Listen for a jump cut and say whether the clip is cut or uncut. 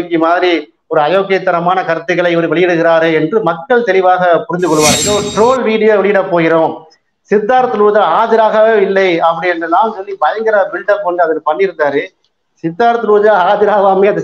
cut